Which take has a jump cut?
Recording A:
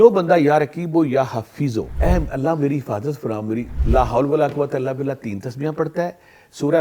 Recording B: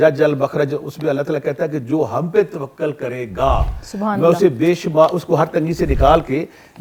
A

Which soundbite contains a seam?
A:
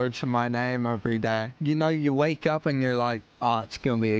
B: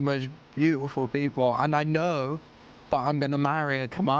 A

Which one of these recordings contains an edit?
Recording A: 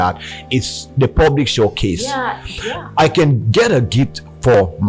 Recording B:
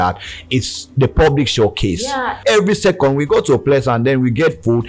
B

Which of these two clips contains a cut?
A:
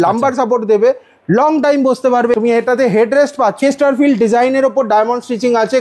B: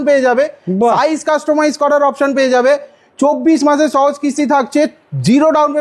A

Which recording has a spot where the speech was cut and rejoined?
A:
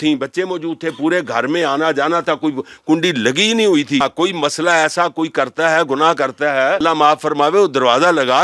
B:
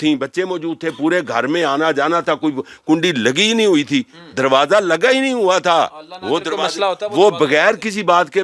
A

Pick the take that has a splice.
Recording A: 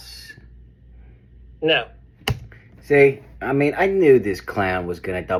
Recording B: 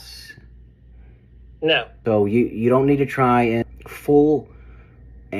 B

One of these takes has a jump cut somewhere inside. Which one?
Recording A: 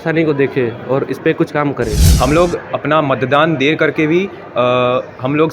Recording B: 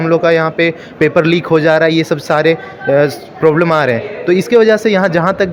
A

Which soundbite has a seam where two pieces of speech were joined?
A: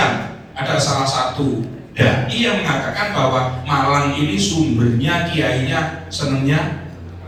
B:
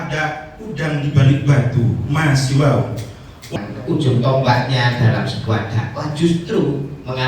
B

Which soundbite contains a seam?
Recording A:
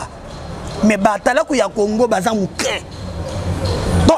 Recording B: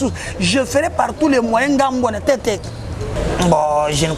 B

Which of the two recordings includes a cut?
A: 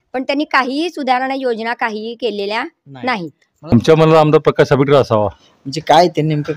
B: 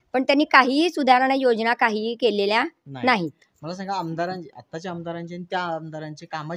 A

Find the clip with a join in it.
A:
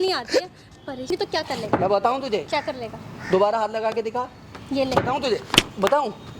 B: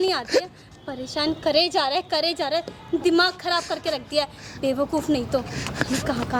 A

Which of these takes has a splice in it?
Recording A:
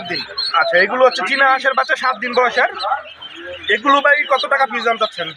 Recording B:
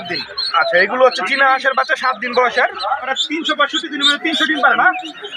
B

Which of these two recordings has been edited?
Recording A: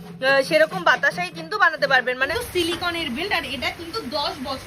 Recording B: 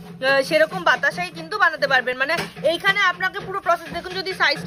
A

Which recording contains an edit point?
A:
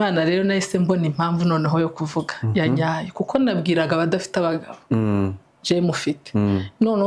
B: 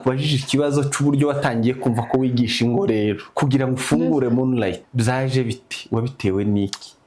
B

